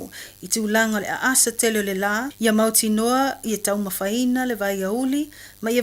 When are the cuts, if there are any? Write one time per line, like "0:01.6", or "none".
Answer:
0:01.4